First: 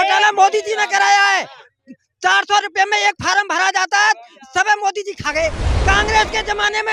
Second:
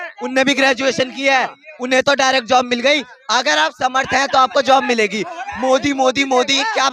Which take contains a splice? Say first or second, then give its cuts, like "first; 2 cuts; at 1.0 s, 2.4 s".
first; 1 cut; at 5.7 s